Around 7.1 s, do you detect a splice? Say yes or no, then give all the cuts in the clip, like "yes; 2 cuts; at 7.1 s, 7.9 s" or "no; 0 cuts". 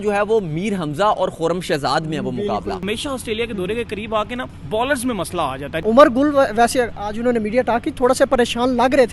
no; 3 cuts; at 2.8 s, 4.5 s, 5.7 s